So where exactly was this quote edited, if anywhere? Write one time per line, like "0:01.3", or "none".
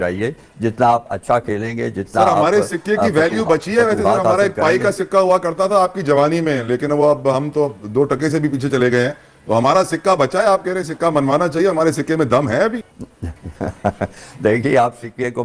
none